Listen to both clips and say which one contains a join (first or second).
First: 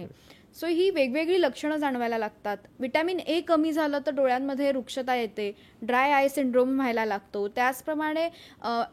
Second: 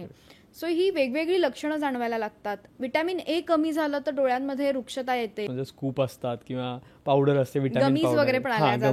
second